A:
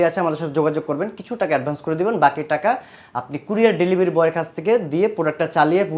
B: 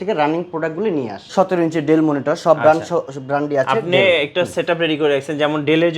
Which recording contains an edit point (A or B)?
B